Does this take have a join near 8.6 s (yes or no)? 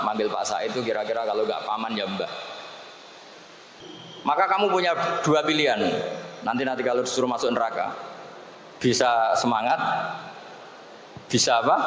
no